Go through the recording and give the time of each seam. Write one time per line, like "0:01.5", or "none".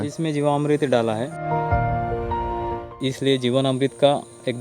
none